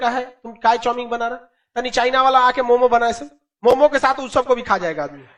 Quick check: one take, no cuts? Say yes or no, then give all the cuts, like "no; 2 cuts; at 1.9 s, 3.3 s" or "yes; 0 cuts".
yes; 0 cuts